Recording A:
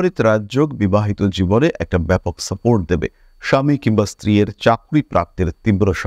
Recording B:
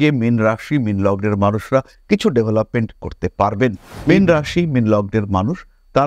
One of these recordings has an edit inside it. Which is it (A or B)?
B